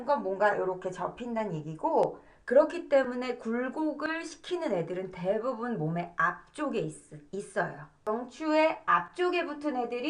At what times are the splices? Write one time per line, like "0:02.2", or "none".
0:07.9